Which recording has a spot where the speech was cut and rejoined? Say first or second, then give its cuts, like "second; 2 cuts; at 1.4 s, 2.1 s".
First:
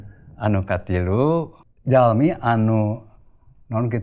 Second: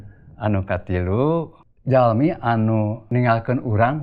second; 1 cut; at 3.1 s